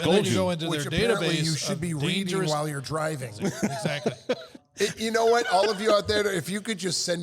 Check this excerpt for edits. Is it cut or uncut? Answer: cut